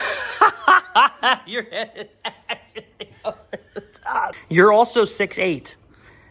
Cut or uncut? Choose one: cut